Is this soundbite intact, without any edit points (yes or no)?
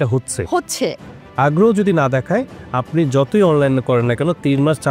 no